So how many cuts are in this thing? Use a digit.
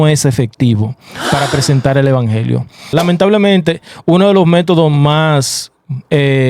1